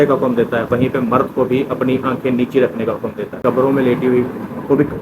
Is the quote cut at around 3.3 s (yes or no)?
yes